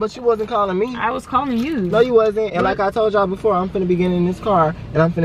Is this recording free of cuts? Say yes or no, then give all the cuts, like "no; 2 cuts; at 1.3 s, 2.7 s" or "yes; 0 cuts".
yes; 0 cuts